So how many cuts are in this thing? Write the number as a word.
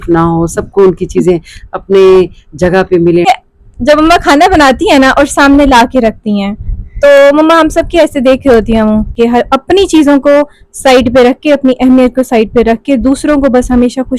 two